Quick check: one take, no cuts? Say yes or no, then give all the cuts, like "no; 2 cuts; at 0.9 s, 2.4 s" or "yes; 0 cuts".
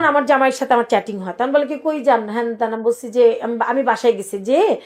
yes; 0 cuts